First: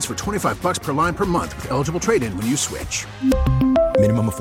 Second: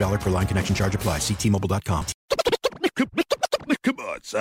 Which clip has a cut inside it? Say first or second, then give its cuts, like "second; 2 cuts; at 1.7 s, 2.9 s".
second; 1 cut; at 2.1 s